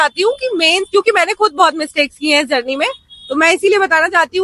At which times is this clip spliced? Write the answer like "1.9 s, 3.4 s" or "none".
none